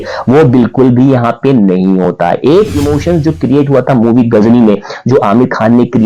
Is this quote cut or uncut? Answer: uncut